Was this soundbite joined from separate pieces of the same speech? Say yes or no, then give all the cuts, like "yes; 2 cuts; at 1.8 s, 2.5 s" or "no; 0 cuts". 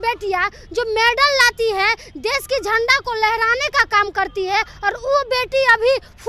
no; 0 cuts